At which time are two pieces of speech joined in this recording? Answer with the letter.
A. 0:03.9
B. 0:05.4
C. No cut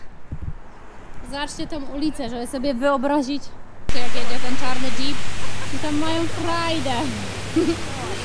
A